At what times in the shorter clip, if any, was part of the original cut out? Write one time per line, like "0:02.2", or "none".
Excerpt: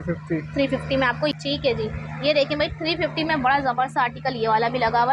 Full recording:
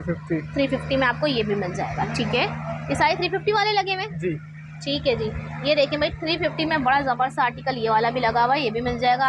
0:01.2